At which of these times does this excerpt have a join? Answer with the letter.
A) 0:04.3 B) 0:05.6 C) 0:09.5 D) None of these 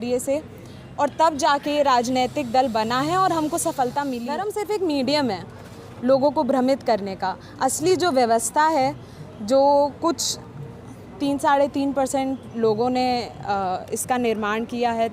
A